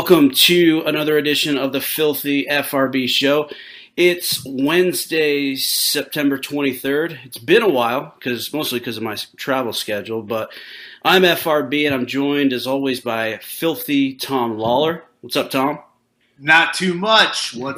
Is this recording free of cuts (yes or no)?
yes